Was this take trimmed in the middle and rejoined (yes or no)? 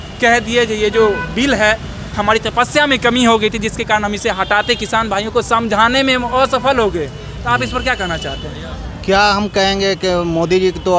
no